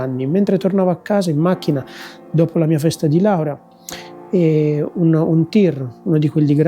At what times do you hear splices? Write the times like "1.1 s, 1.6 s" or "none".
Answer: none